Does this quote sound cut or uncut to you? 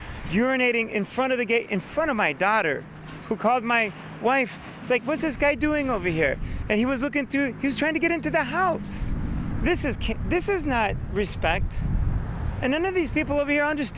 uncut